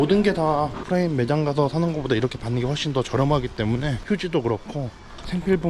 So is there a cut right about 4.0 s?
yes; 2 cuts; at 0.8 s, 4.0 s

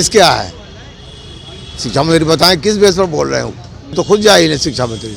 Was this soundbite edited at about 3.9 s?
yes; 1 cut; at 3.9 s

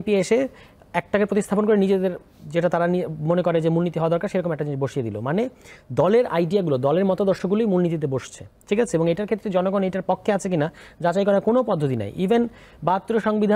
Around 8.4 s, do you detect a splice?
no; 0 cuts

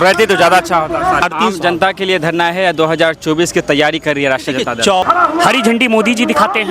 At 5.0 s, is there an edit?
yes; 2 cuts; at 1.2 s, 5.0 s

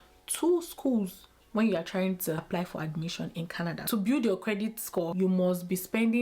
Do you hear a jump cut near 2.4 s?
yes; 3 cuts; at 2.4 s, 3.8 s, 5.1 s

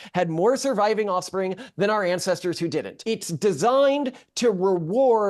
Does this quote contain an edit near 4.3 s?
no; 1 cut; at 3.0 s

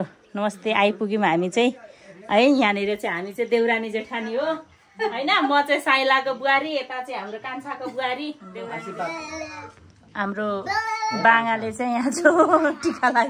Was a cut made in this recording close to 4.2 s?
no; 1 cut; at 8.7 s

